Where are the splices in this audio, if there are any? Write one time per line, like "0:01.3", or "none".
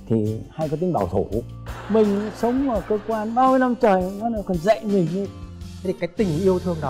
0:01.7
0:05.5